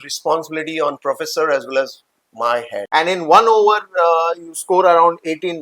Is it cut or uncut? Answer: cut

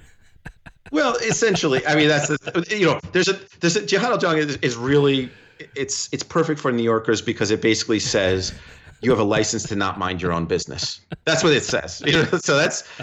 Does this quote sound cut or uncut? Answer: uncut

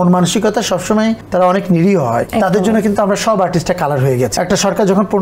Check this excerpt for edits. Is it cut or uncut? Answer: cut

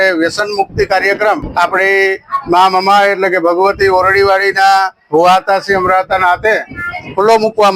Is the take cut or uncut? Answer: cut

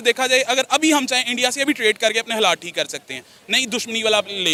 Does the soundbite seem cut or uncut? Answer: uncut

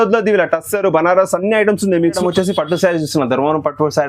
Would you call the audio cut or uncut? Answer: cut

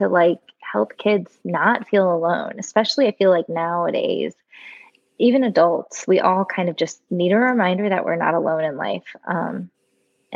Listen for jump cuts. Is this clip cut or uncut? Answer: uncut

